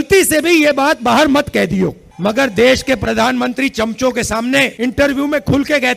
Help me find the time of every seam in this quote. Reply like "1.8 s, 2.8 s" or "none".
2.0 s, 4.7 s